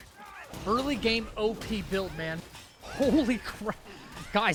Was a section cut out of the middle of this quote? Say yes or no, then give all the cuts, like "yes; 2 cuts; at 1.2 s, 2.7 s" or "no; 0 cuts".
no; 0 cuts